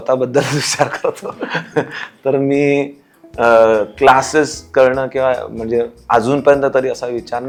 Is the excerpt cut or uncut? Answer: uncut